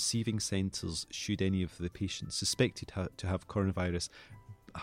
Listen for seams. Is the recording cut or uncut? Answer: uncut